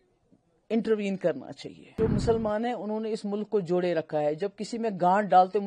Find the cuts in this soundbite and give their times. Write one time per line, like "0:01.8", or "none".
0:02.0